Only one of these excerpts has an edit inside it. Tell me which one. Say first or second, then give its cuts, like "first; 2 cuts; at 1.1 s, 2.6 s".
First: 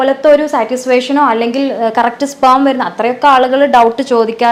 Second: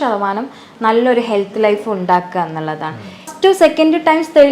second; 1 cut; at 3.3 s